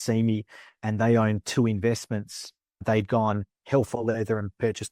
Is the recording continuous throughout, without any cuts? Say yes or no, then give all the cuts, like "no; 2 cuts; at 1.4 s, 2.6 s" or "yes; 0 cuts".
no; 1 cut; at 2.8 s